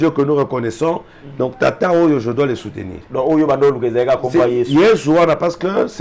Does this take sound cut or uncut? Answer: uncut